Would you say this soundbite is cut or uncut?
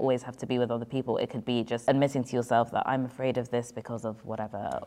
cut